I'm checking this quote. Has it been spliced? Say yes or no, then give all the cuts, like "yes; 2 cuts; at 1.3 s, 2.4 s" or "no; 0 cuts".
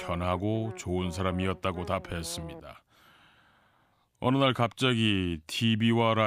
yes; 1 cut; at 3.0 s